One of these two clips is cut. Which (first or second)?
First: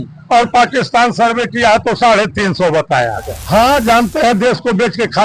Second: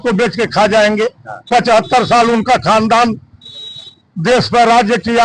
first